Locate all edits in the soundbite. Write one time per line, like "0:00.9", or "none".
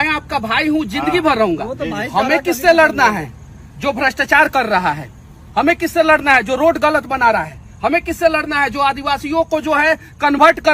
none